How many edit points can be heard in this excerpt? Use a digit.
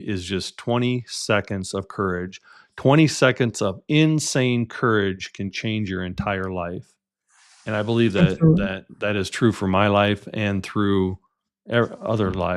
0